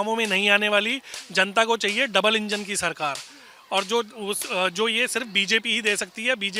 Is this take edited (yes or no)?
no